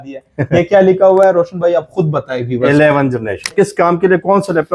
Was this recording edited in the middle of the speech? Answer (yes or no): yes